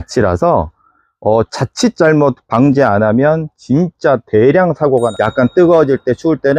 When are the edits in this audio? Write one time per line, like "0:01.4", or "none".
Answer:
0:05.1